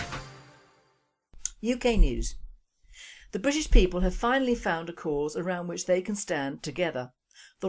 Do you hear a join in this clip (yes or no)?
yes